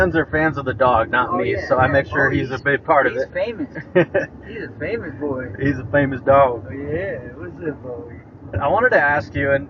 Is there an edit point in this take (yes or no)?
no